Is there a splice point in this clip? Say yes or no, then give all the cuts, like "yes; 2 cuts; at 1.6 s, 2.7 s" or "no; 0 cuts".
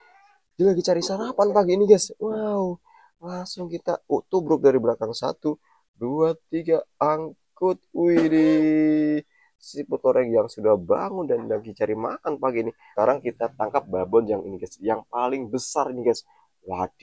yes; 1 cut; at 12.9 s